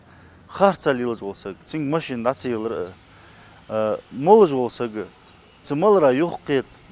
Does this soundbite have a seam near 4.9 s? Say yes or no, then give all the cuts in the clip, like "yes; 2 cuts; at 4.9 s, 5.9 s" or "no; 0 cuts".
no; 1 cut; at 2.7 s